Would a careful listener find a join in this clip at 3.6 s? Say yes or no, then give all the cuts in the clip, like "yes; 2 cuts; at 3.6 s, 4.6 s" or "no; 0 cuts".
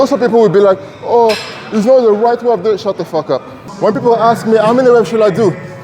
yes; 1 cut; at 3.6 s